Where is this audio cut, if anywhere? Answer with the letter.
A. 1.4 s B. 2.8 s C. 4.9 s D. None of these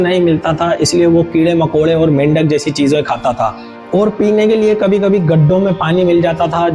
D